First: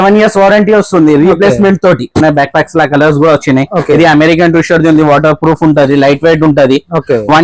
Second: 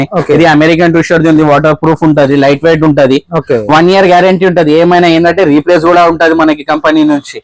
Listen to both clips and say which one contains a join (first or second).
first